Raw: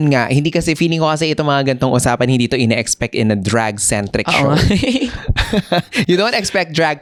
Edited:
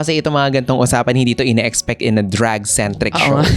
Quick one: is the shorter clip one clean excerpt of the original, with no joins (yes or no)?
yes